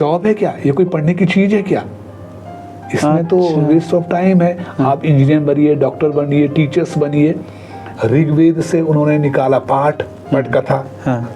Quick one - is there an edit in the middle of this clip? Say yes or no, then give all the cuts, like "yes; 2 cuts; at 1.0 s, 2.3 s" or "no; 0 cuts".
yes; 1 cut; at 7.9 s